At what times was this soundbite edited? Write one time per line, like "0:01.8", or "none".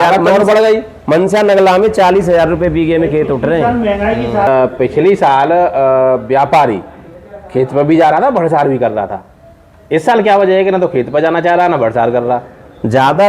0:04.5

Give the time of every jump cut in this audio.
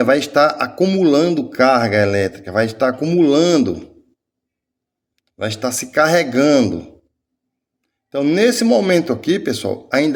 none

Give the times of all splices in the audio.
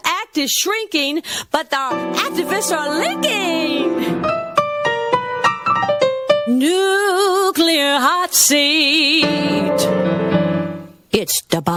none

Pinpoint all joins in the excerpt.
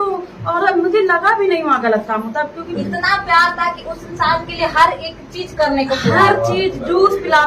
0:02.6

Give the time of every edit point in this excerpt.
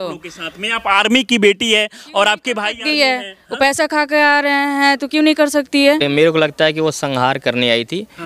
0:06.0

